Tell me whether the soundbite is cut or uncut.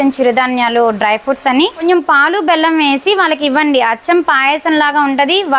cut